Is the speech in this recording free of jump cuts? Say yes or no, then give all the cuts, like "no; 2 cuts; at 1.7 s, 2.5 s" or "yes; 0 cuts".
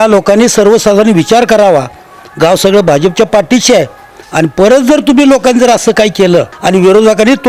no; 1 cut; at 6.5 s